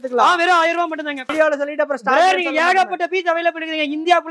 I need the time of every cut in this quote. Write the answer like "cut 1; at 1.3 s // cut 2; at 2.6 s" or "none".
cut 1; at 1.3 s